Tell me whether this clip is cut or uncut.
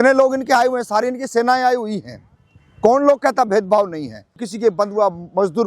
cut